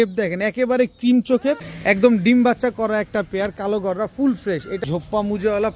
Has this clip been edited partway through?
yes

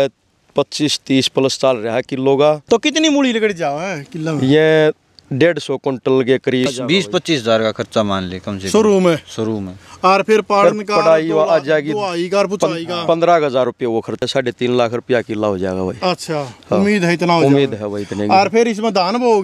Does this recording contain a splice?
yes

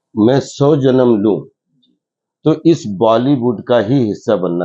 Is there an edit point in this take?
no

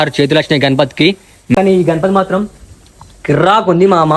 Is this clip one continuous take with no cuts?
no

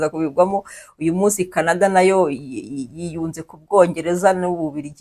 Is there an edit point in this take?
no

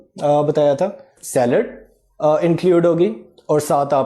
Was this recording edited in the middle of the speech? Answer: yes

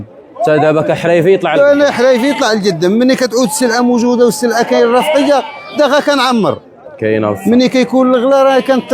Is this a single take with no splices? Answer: yes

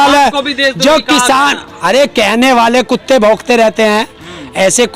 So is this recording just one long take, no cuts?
yes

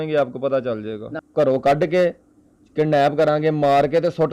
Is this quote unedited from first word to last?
no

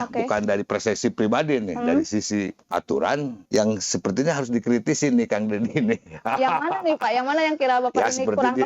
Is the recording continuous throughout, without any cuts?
no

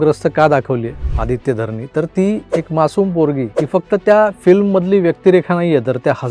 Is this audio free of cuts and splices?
no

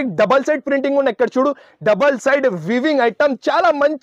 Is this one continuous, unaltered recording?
yes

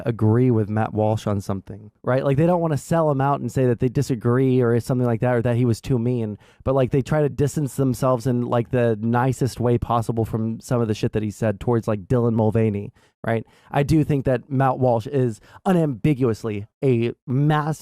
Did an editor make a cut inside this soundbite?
yes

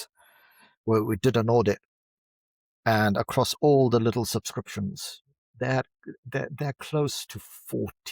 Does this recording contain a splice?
no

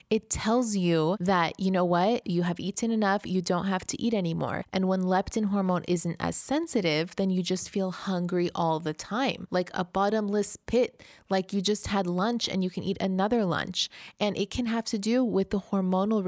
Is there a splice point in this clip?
yes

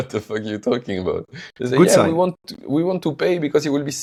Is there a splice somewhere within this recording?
no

